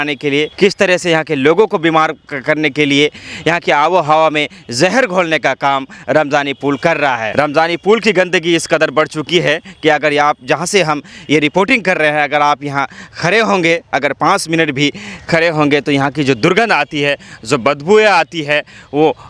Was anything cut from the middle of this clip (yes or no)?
no